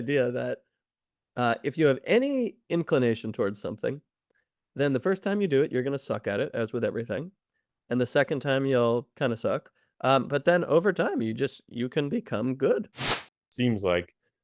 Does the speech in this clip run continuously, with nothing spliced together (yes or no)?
no